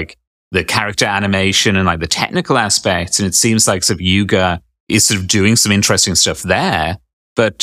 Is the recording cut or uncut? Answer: cut